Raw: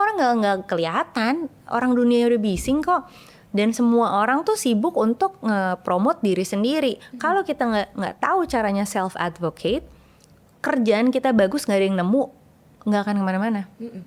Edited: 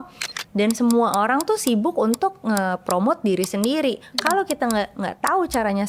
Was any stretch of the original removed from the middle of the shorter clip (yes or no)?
no